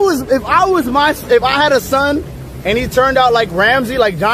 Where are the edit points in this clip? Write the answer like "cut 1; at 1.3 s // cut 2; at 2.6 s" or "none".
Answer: none